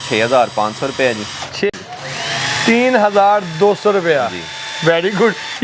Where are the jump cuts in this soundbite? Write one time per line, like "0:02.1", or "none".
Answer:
0:01.7